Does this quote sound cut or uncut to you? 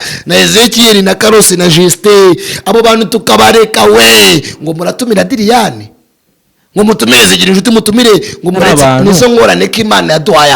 cut